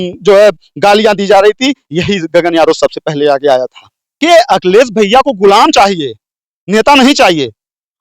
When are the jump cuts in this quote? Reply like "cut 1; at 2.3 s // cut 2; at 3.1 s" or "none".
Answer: cut 1; at 4.2 s